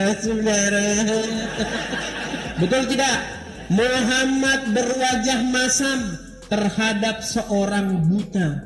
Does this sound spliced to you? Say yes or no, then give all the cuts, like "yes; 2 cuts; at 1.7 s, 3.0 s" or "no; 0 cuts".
yes; 1 cut; at 2.5 s